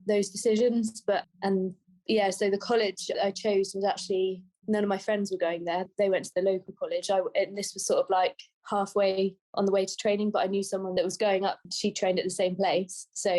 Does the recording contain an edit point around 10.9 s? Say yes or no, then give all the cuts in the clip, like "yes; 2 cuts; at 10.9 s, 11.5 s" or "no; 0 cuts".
yes; 3 cuts; at 3.2 s, 5.9 s, 10.9 s